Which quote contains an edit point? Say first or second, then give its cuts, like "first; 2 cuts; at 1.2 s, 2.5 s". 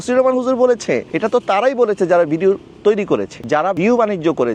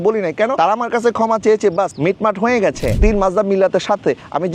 second; 2 cuts; at 1.9 s, 3.0 s